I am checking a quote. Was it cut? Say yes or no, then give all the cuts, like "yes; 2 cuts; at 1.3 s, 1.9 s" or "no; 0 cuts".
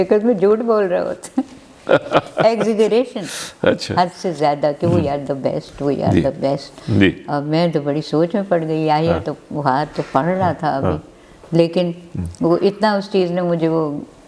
no; 0 cuts